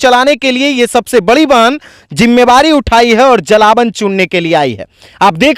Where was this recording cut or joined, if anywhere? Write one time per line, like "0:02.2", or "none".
none